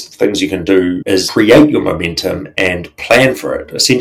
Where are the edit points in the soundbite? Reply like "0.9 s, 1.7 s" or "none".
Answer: 1.2 s